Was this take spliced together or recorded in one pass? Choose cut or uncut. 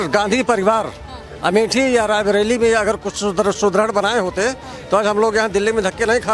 uncut